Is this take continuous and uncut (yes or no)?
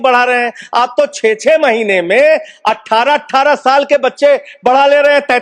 yes